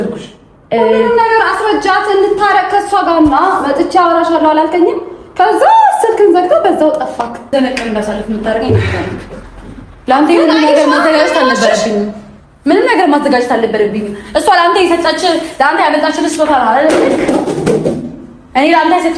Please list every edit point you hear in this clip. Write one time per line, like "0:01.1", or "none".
0:07.5